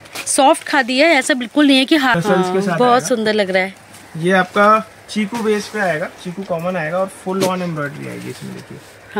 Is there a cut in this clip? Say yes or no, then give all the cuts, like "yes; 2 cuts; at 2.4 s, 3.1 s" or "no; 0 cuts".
yes; 1 cut; at 2.1 s